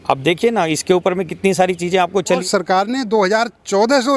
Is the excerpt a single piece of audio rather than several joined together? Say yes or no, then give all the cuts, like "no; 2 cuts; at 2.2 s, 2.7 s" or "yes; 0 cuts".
no; 1 cut; at 2.4 s